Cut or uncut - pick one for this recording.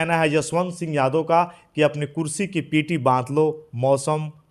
uncut